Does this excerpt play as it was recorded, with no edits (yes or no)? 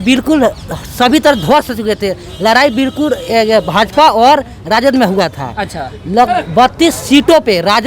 yes